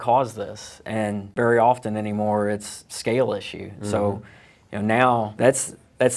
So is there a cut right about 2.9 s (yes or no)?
no